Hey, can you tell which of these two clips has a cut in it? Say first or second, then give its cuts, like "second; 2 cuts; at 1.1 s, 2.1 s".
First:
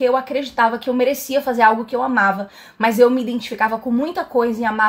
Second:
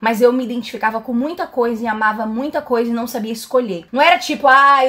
second; 1 cut; at 3.8 s